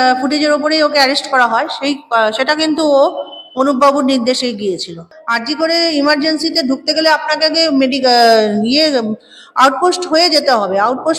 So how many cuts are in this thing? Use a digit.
1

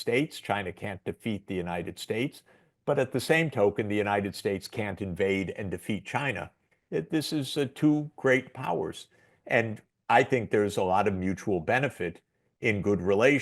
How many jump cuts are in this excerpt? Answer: 1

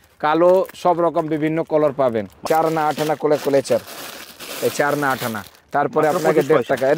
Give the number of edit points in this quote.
1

